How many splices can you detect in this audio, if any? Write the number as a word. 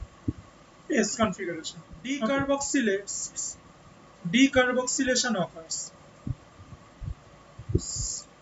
one